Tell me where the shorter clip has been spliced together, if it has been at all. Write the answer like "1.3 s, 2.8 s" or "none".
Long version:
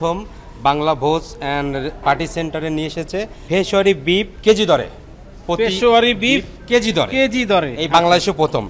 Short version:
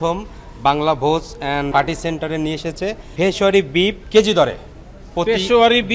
1.7 s